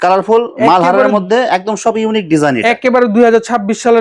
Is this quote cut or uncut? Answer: uncut